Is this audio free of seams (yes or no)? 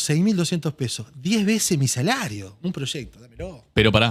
yes